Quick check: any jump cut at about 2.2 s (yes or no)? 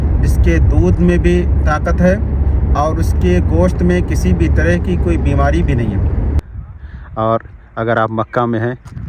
no